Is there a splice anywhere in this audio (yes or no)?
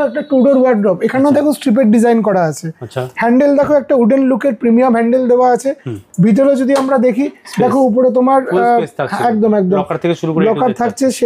no